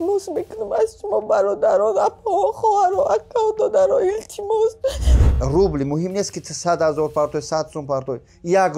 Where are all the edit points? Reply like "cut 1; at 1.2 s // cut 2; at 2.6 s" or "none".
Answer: cut 1; at 5.2 s